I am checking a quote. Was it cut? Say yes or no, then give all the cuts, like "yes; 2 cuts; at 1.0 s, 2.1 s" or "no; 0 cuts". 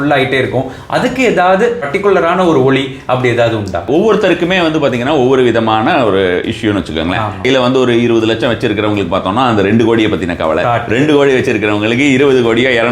yes; 3 cuts; at 1.8 s, 3.8 s, 7.4 s